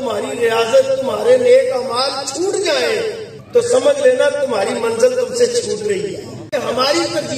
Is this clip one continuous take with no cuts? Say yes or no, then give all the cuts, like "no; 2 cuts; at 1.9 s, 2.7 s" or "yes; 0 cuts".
no; 2 cuts; at 3.3 s, 6.4 s